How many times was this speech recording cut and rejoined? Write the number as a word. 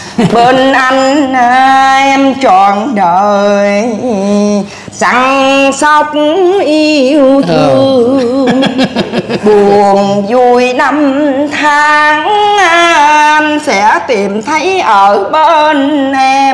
zero